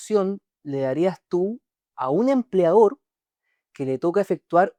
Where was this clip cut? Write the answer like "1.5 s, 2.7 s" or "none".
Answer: none